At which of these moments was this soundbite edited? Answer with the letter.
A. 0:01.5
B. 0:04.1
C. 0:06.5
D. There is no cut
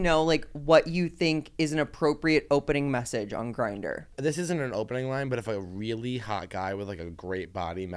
B